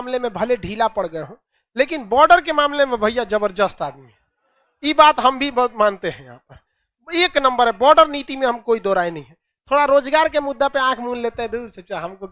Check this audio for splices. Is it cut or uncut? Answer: uncut